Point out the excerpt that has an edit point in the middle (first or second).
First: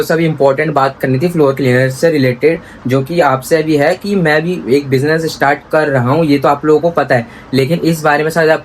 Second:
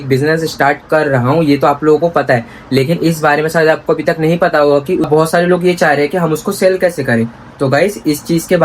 second